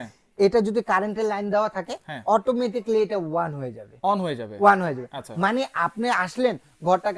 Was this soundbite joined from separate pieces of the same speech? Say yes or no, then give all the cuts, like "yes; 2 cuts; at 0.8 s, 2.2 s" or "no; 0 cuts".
no; 0 cuts